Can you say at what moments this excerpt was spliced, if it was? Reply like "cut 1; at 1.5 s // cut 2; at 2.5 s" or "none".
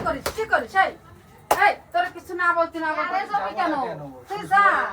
cut 1; at 3.1 s

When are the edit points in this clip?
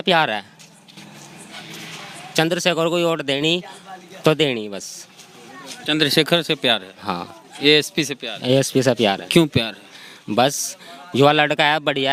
none

